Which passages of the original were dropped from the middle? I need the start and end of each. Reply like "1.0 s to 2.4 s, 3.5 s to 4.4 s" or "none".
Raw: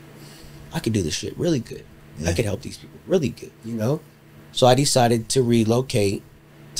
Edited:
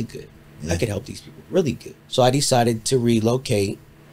3.5 s to 4.4 s